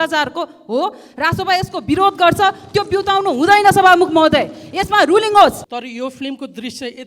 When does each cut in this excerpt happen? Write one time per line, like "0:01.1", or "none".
0:05.7